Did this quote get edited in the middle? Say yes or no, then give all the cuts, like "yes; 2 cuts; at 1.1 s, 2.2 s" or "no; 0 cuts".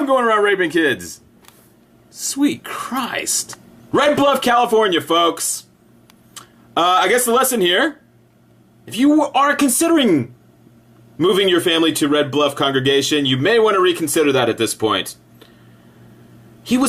yes; 1 cut; at 10.0 s